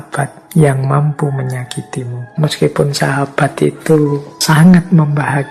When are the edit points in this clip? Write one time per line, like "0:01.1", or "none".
0:02.3
0:04.3